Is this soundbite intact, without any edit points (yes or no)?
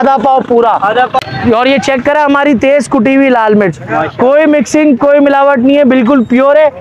no